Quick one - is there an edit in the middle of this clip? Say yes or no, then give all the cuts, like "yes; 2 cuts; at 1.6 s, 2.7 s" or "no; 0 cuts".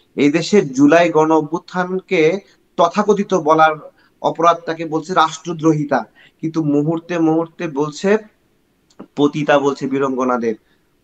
no; 0 cuts